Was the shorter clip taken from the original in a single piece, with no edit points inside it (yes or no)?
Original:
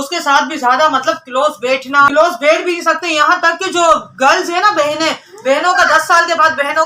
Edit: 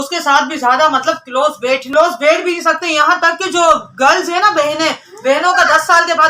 no